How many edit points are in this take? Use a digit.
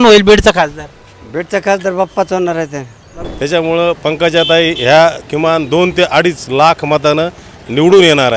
1